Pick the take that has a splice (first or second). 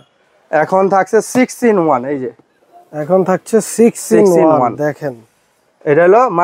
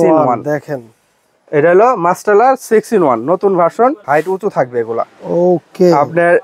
second